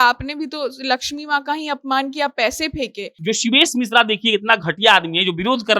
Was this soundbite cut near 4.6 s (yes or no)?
no